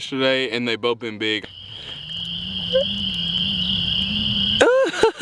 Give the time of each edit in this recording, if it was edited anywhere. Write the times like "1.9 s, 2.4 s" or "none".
1.4 s